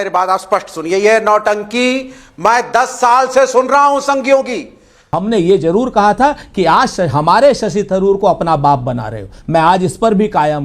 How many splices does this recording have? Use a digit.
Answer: 1